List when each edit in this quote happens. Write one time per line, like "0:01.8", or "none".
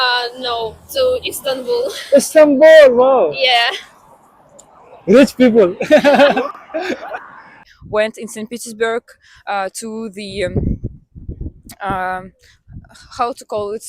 0:07.6

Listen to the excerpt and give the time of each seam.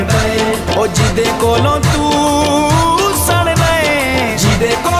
none

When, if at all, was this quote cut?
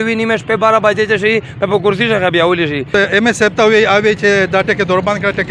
0:02.9

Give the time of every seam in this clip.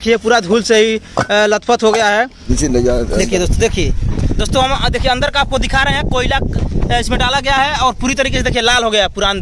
0:02.5

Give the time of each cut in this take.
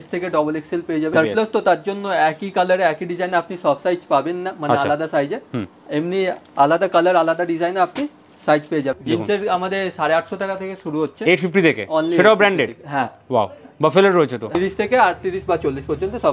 0:01.1
0:09.0
0:14.6

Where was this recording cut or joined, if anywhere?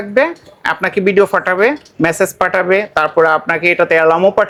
none

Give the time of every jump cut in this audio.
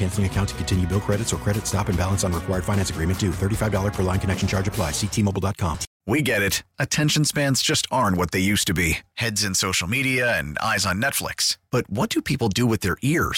0:05.9

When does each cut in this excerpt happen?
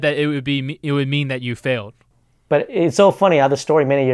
0:02.0

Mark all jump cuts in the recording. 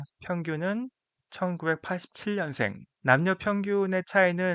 0:02.9

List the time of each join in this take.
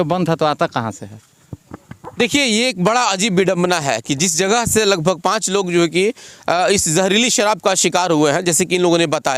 none

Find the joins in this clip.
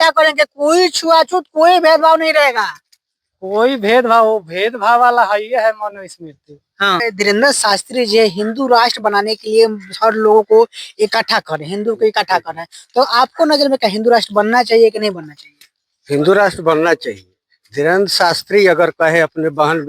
0:07.0

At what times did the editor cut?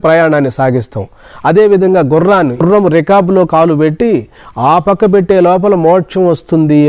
0:02.6

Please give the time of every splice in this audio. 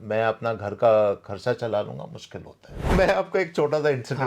0:02.9

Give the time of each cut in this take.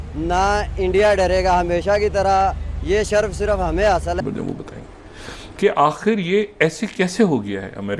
0:04.2

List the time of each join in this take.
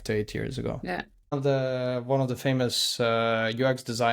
0:01.3

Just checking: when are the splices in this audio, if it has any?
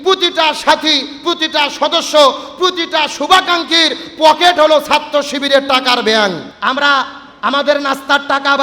0:06.5

